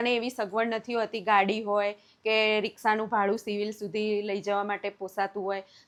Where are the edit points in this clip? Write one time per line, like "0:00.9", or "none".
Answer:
none